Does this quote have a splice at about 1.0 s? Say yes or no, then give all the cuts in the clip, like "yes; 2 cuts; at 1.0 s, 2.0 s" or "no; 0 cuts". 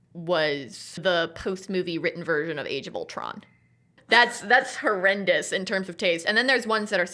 yes; 2 cuts; at 1.0 s, 4.0 s